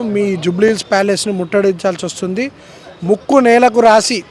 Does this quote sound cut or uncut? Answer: uncut